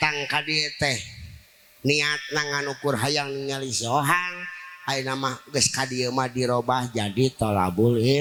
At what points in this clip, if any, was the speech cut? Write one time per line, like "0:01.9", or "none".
none